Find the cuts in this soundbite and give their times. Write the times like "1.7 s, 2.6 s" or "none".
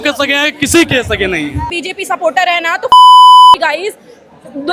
1.7 s